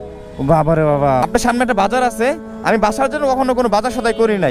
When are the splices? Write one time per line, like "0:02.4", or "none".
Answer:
0:01.2